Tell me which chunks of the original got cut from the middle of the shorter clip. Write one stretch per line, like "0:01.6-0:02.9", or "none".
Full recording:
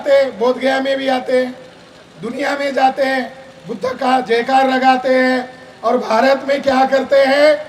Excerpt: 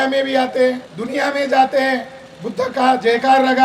0:01.7-0:02.2